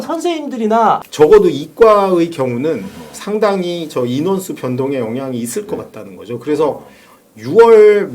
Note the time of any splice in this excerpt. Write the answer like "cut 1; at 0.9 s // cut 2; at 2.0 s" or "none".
cut 1; at 1.0 s